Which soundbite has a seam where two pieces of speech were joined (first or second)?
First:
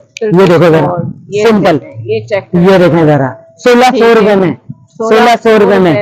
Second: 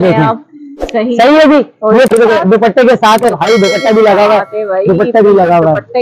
second